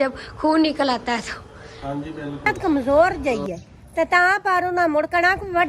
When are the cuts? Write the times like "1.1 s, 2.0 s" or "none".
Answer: 2.6 s